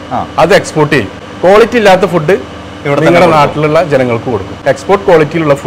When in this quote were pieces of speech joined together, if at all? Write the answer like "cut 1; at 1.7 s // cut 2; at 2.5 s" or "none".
cut 1; at 1.2 s // cut 2; at 4.5 s